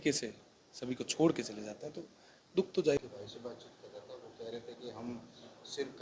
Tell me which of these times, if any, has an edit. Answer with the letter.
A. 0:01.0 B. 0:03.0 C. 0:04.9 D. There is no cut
B